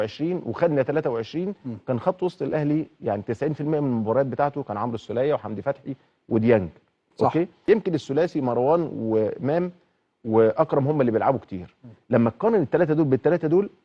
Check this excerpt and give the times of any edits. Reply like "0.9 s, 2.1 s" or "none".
7.6 s